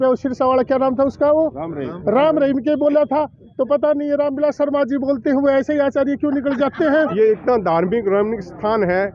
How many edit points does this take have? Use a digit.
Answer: 1